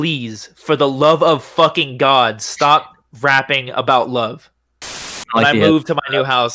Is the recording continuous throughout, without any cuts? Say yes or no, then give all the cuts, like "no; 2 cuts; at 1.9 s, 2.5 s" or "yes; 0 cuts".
no; 1 cut; at 5.1 s